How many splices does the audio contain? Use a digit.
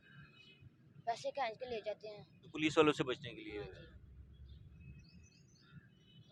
0